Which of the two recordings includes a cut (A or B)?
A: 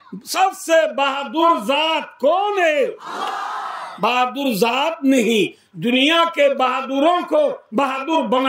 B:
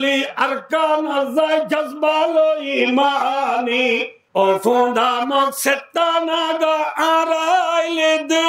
B